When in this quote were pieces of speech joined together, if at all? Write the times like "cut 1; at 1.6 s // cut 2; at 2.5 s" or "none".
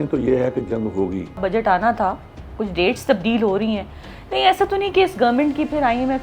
cut 1; at 1.4 s